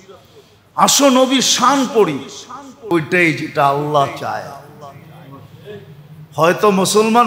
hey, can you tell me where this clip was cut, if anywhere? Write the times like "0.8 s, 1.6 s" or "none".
2.9 s